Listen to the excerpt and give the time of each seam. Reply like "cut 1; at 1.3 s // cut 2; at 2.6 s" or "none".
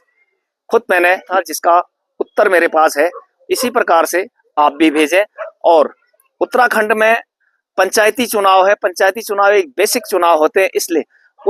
cut 1; at 1.3 s